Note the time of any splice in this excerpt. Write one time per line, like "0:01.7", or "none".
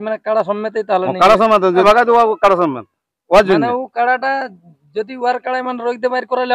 0:01.8